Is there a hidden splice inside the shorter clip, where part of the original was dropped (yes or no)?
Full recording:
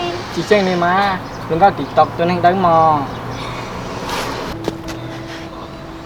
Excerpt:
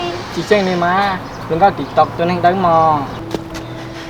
yes